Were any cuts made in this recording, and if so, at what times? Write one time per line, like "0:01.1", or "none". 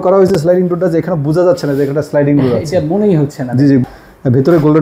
0:03.8